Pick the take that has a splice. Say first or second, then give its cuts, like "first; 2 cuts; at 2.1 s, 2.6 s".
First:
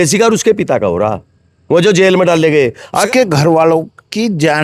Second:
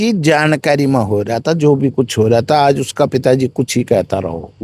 first; 1 cut; at 3.1 s